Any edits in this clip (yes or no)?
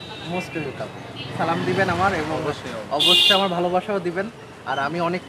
yes